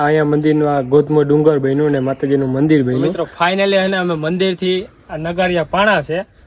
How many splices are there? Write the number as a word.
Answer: one